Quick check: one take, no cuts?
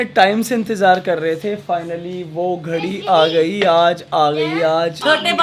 yes; 0 cuts

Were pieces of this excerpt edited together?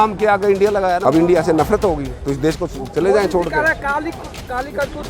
yes; 1 cut; at 1.0 s

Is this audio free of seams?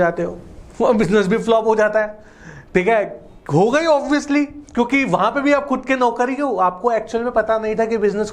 yes; 0 cuts

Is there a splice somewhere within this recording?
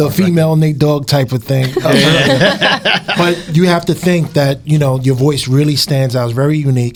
no; 0 cuts

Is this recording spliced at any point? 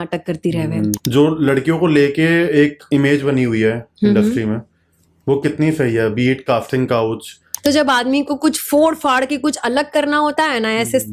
yes; 2 cuts; at 1.0 s, 7.4 s

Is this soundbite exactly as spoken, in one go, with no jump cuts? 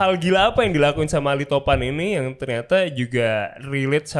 yes; 0 cuts

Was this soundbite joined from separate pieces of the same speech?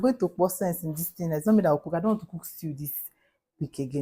no; 0 cuts

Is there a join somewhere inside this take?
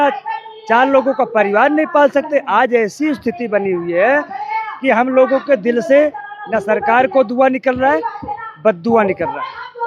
no; 0 cuts

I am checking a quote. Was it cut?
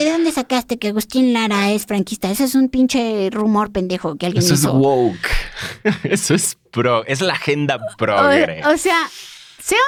no; 0 cuts

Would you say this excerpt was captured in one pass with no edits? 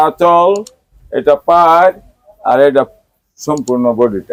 yes; 0 cuts

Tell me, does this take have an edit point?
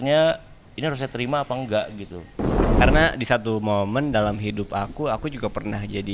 yes; 1 cut; at 2.7 s

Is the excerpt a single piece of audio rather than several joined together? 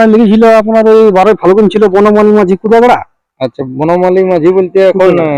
yes; 0 cuts

